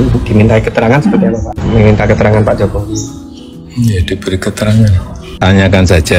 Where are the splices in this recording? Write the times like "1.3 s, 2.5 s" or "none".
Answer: 5.3 s